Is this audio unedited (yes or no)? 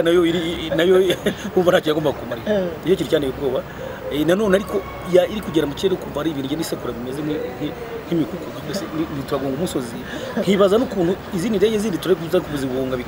yes